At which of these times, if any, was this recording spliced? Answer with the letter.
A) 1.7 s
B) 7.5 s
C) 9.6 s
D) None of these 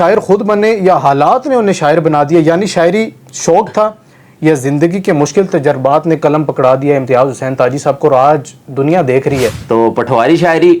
C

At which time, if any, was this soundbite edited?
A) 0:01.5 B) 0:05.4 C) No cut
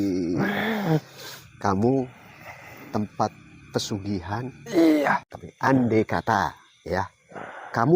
B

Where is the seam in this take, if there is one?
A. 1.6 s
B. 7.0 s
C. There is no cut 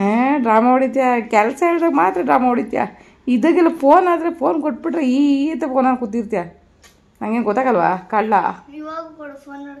C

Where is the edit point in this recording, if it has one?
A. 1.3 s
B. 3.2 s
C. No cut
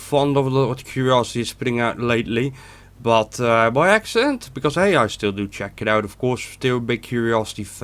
A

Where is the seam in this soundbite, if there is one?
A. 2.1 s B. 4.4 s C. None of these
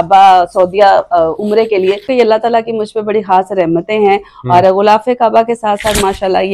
A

